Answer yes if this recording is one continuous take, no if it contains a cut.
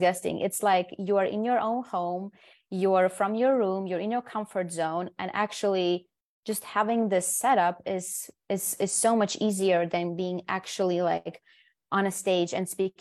yes